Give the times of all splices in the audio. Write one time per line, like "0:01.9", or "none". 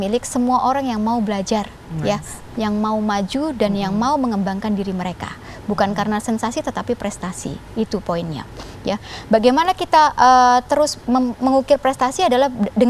none